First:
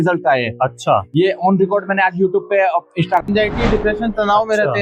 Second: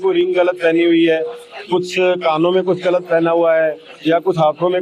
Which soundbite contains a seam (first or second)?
first